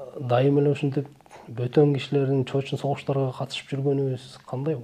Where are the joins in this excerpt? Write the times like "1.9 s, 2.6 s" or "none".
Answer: none